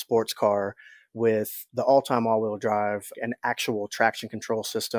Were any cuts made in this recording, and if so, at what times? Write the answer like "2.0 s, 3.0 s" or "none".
1.6 s, 3.1 s